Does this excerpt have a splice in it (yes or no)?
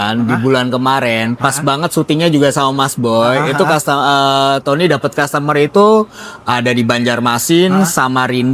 no